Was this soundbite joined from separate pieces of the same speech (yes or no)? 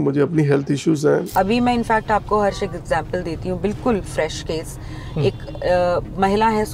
yes